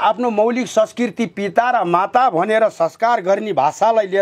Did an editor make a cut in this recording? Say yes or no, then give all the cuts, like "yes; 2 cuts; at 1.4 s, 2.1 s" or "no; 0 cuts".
no; 0 cuts